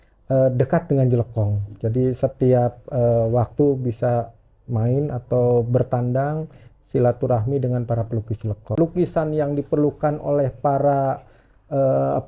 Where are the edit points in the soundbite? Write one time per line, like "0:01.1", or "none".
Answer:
0:08.7